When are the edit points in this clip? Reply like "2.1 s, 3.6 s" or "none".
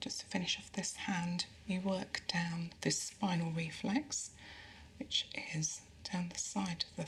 none